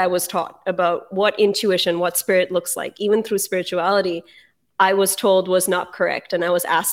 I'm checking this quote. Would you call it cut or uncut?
uncut